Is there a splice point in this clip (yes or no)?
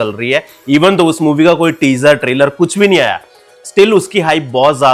no